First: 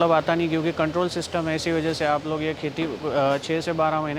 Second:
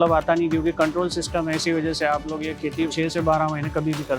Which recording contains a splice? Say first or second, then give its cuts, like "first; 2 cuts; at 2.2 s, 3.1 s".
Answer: second; 1 cut; at 2.9 s